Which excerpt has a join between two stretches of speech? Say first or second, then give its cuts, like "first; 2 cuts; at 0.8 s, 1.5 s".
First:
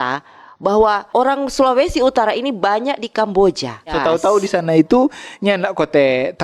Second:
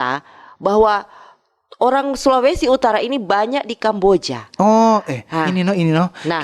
first; 2 cuts; at 1.0 s, 3.9 s